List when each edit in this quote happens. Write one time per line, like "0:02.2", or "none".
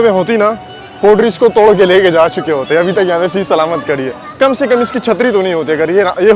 none